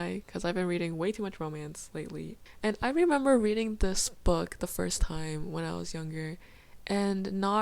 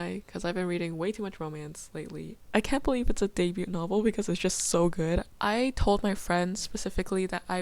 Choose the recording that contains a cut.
second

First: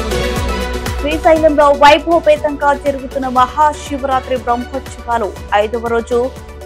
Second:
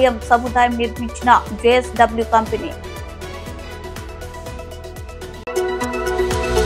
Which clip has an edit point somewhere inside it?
first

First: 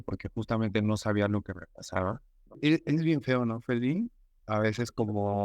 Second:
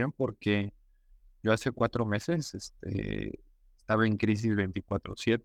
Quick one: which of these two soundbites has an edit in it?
first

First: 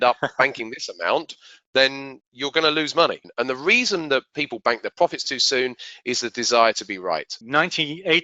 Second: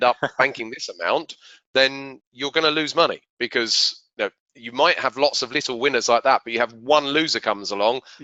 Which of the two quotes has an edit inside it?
first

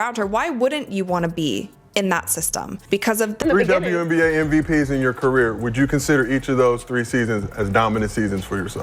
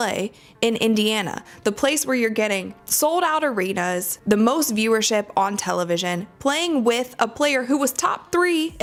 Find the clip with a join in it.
first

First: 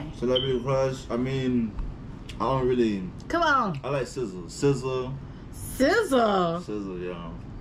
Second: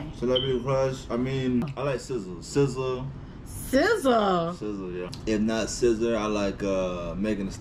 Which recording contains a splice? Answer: second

